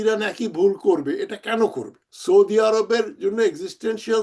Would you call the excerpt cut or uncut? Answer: cut